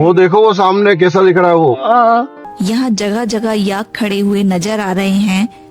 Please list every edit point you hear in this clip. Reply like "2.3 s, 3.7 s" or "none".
2.4 s

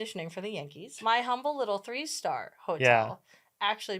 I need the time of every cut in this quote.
0.9 s

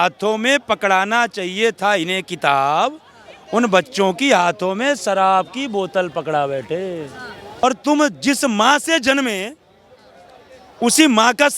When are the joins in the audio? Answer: 7.6 s

